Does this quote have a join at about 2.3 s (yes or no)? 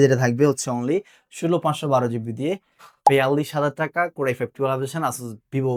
no